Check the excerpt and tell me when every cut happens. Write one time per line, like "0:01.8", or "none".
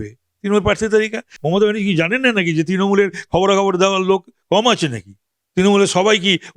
0:01.2